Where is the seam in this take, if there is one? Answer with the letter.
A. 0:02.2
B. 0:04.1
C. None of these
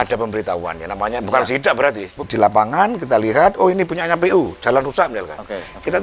A